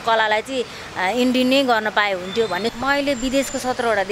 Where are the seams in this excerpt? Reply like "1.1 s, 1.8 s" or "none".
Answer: 2.7 s

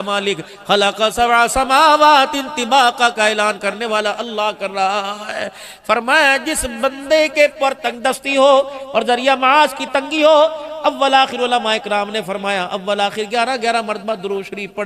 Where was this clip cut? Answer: none

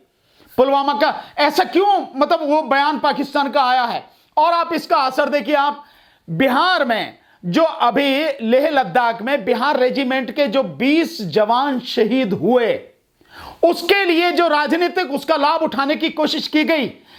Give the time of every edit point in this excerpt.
none

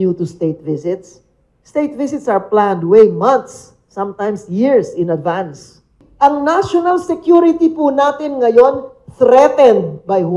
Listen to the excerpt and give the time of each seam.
6.0 s

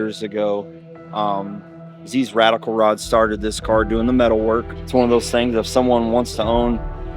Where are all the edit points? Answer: 4.8 s

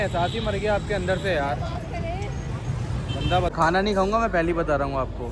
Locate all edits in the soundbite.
3.5 s

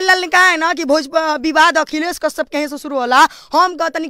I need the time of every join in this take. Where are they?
none

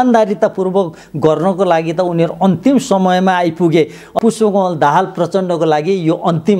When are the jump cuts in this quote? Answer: 4.1 s

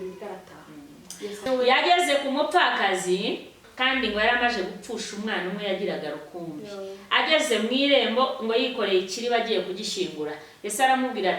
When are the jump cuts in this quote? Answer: 1.5 s, 3.7 s

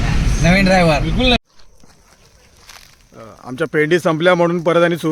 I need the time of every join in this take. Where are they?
1.4 s

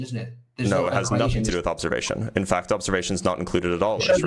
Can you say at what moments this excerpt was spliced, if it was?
none

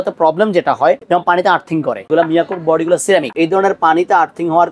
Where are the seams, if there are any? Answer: 1.0 s, 2.1 s, 3.3 s

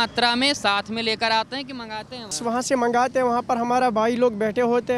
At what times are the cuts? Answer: 2.4 s

